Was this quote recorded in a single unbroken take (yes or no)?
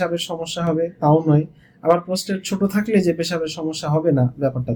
yes